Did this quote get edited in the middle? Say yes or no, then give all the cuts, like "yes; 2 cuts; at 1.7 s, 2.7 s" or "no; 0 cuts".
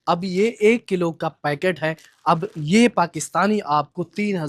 no; 0 cuts